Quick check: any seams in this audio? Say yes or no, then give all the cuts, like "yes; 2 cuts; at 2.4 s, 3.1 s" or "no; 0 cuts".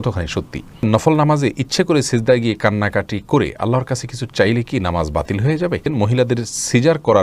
yes; 2 cuts; at 0.8 s, 5.9 s